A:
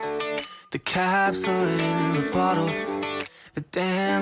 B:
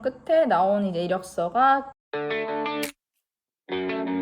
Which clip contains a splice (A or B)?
B